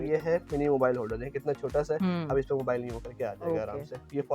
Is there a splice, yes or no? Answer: no